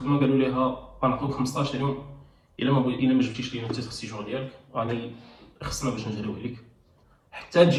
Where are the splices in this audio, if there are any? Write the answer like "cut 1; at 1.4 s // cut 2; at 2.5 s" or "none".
none